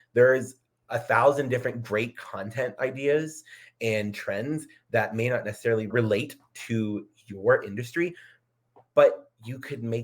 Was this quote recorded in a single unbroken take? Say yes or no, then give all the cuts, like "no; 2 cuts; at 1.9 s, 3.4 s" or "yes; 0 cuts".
no; 1 cut; at 5.9 s